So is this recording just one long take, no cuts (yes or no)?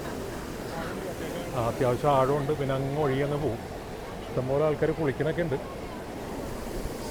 yes